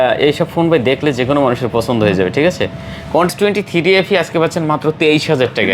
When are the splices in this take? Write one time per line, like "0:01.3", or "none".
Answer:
0:03.3